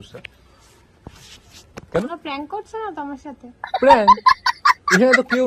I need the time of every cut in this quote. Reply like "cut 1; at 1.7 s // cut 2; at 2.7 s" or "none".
none